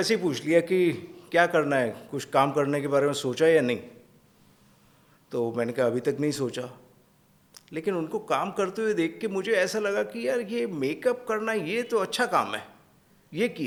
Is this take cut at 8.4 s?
no; 0 cuts

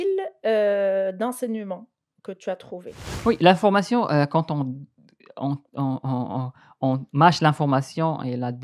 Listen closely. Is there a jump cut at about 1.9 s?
no; 1 cut; at 3.2 s

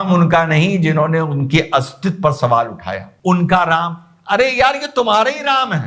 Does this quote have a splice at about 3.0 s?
yes; 1 cut; at 3.0 s

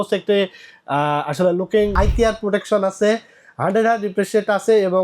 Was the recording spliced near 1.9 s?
yes; 1 cut; at 1.9 s

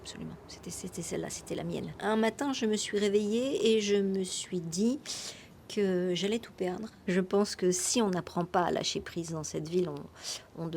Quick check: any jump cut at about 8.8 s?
no; 2 cuts; at 1.9 s, 6.9 s

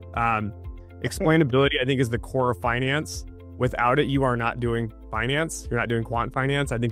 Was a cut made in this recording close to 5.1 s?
no; 0 cuts

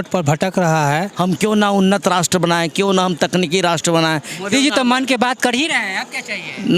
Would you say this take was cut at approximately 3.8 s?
no; 1 cut; at 1.1 s

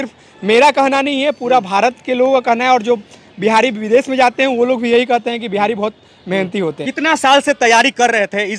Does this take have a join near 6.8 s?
yes; 1 cut; at 6.8 s

